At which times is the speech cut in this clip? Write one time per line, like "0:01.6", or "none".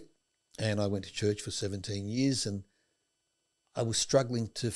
none